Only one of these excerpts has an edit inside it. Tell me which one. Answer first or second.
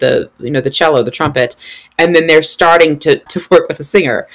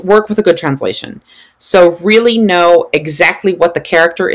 first